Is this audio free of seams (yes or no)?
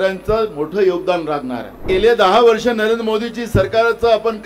no